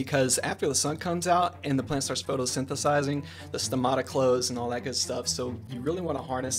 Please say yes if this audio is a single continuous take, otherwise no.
yes